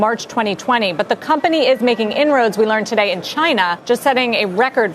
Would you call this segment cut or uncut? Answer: cut